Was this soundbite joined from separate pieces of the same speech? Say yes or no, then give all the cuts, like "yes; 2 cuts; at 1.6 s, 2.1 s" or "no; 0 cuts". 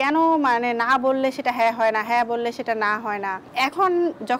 yes; 1 cut; at 3.4 s